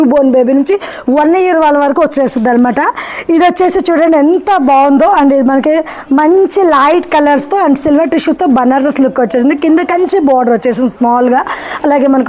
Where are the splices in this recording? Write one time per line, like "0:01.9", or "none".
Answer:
none